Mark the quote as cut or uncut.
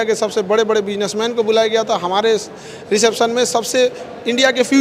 uncut